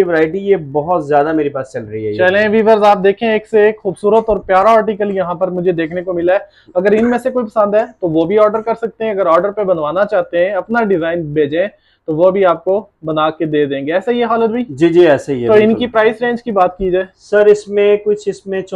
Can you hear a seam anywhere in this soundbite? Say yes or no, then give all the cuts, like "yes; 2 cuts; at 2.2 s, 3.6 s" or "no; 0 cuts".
no; 0 cuts